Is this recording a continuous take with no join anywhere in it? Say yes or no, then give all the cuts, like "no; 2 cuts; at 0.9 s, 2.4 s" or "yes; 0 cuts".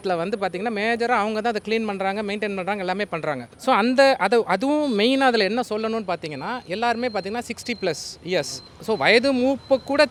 yes; 0 cuts